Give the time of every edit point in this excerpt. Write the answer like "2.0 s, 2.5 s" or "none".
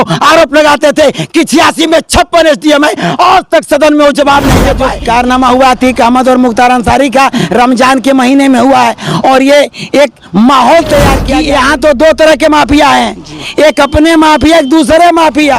4.9 s, 11.3 s